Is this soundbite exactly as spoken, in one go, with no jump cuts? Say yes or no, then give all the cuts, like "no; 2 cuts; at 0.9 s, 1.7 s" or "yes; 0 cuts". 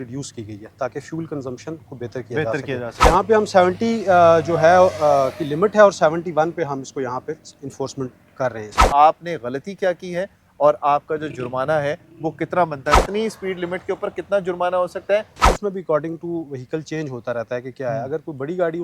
no; 4 cuts; at 3.1 s, 8.8 s, 13.0 s, 15.4 s